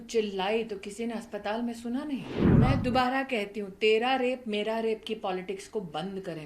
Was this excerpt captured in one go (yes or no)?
no